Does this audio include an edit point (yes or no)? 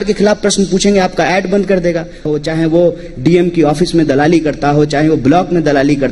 yes